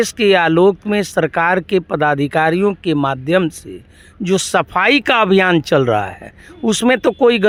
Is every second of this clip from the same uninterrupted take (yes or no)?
yes